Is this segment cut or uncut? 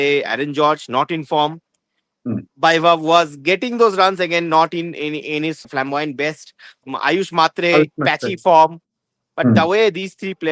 cut